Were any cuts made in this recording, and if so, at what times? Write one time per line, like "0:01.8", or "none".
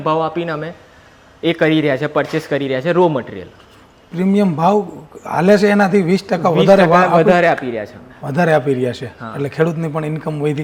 none